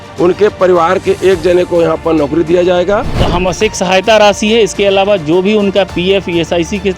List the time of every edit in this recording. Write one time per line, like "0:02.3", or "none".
0:03.2